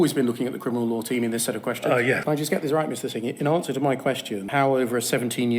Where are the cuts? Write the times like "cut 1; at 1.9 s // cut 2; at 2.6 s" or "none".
cut 1; at 2.2 s // cut 2; at 4.4 s